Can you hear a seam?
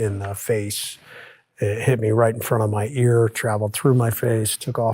no; 0 cuts

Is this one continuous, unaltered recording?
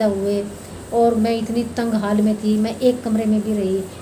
yes; 0 cuts

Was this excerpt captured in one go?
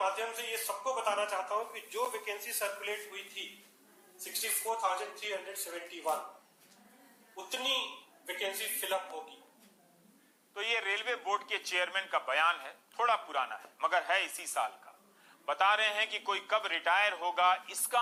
yes; 0 cuts

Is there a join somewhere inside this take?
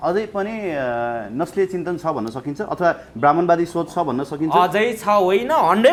no; 0 cuts

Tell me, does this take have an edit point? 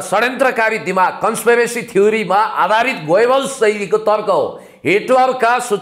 no; 0 cuts

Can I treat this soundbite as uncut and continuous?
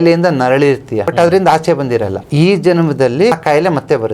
no; 3 cuts; at 1.1 s, 2.2 s, 3.3 s

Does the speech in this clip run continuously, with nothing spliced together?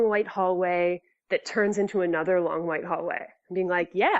no; 1 cut; at 1.1 s

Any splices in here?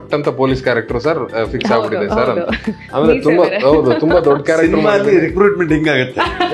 no; 0 cuts

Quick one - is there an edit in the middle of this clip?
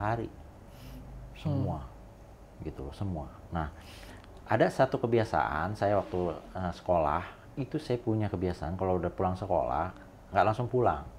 no; 0 cuts

